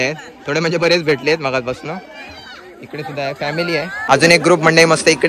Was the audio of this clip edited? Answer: yes; 1 cut; at 4.1 s

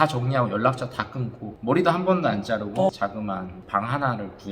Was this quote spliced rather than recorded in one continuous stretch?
no; 0 cuts

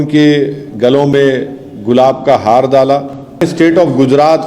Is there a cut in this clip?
yes; 1 cut; at 3.4 s

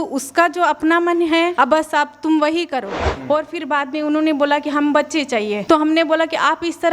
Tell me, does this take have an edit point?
yes; 3 cuts; at 1.5 s, 3.1 s, 5.6 s

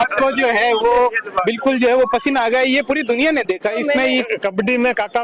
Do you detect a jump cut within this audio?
yes; 1 cut; at 4.3 s

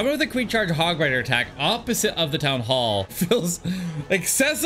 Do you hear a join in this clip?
yes; 1 cut; at 3.1 s

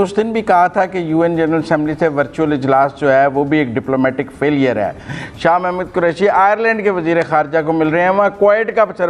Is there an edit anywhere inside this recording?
no; 0 cuts

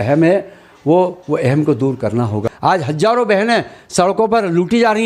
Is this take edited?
yes; 1 cut; at 2.5 s

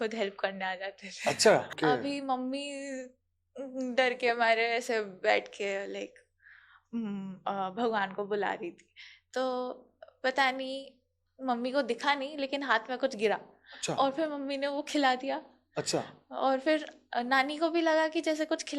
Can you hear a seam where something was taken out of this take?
yes; 1 cut; at 1.8 s

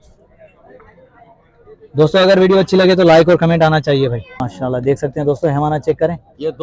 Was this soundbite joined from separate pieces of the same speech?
yes; 1 cut; at 4.4 s

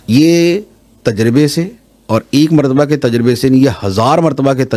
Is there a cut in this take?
no; 0 cuts

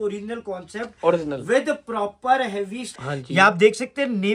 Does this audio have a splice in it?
yes; 1 cut; at 3.0 s

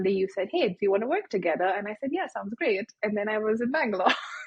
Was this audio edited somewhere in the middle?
no; 0 cuts

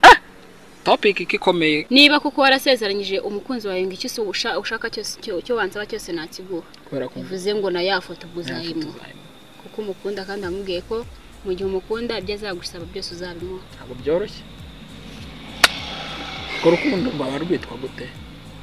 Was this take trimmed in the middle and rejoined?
yes; 1 cut; at 1.8 s

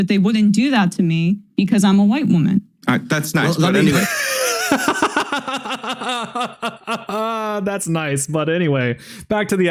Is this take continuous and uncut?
yes; 0 cuts

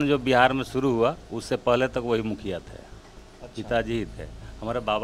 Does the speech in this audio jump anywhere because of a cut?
no; 0 cuts

